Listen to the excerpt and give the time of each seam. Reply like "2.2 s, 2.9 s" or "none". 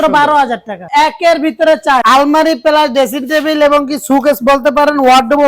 0.8 s, 2.0 s